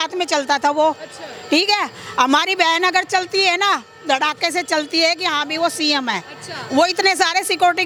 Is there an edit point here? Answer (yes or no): no